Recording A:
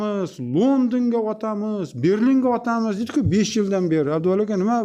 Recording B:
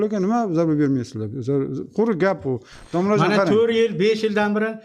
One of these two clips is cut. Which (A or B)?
B